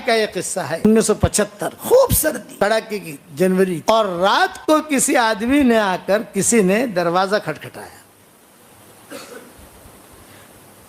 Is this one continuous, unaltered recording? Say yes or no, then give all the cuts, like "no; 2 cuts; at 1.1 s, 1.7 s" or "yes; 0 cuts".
no; 4 cuts; at 0.8 s, 1.7 s, 2.5 s, 3.8 s